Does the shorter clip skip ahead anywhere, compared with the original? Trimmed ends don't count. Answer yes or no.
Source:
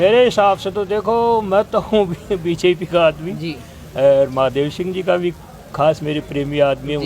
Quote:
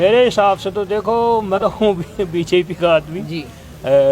yes